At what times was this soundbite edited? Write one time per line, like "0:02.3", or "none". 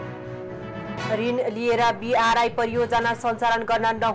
0:01.1